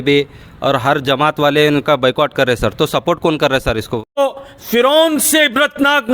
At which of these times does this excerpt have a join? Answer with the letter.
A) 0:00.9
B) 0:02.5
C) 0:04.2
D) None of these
C